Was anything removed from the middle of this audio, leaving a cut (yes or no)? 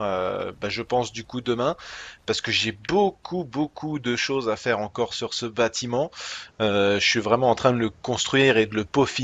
yes